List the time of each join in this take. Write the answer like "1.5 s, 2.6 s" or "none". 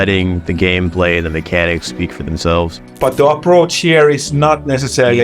2.7 s